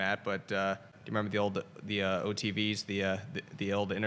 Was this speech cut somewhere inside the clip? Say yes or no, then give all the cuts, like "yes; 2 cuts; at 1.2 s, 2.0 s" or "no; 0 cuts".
yes; 1 cut; at 1.0 s